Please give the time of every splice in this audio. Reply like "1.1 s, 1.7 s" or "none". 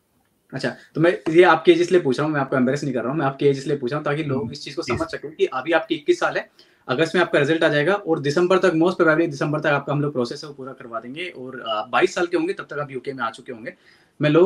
none